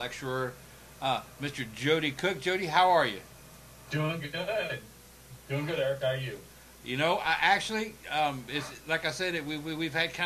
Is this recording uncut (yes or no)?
no